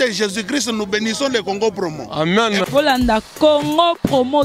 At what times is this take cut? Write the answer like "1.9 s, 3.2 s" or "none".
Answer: none